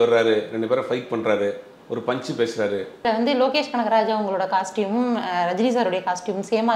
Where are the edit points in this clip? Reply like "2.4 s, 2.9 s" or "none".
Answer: 3.0 s